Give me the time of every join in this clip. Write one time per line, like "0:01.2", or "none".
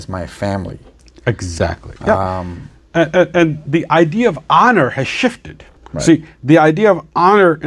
none